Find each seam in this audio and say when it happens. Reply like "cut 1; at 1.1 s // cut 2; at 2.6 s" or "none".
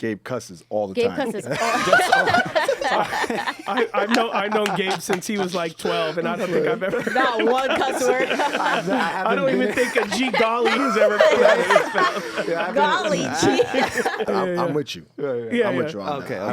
cut 1; at 14.3 s